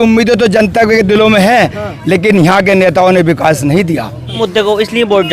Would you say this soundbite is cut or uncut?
cut